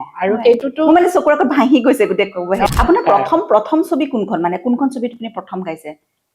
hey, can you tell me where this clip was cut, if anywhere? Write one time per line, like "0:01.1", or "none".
0:02.7